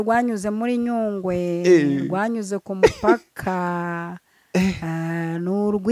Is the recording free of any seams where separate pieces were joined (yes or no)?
yes